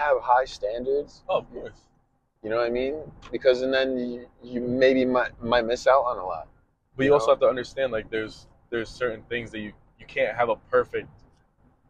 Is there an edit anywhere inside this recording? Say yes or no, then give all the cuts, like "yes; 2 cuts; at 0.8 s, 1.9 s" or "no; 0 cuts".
no; 0 cuts